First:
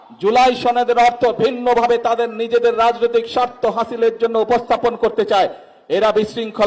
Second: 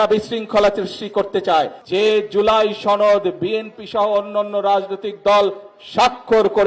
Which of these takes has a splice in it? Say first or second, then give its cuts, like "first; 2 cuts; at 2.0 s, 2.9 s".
second; 1 cut; at 1.8 s